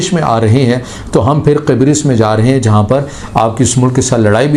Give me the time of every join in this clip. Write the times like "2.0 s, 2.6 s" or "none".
none